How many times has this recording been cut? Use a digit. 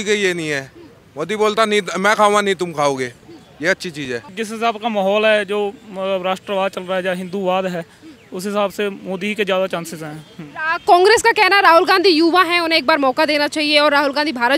1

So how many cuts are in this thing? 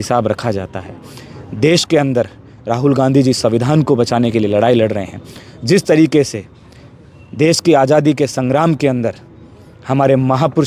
0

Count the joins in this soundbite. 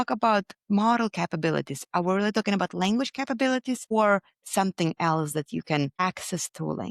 2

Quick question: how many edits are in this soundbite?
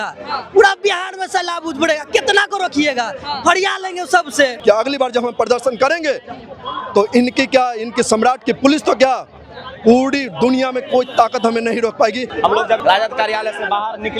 2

